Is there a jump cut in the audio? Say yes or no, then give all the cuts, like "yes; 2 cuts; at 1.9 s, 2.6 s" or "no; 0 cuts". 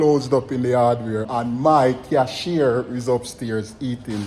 yes; 1 cut; at 1.3 s